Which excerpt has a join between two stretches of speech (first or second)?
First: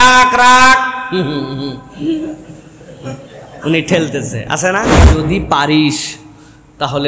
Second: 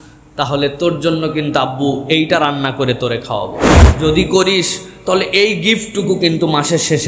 first